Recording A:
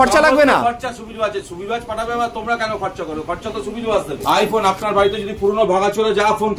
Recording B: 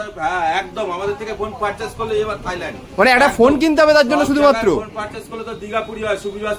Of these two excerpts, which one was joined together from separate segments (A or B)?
A